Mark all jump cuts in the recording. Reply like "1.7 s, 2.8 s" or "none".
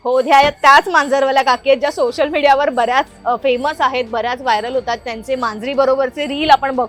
none